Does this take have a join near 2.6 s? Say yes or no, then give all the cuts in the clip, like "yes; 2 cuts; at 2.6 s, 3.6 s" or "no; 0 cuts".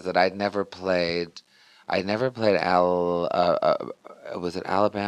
yes; 1 cut; at 2.6 s